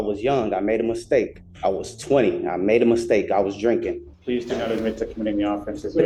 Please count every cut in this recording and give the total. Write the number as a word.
two